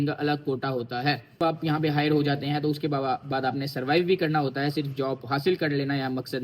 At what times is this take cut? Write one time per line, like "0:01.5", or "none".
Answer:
0:01.4